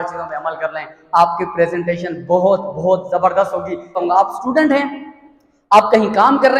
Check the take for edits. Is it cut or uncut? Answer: cut